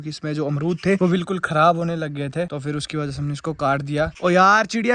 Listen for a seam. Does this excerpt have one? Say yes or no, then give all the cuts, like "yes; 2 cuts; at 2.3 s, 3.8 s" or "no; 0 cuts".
no; 0 cuts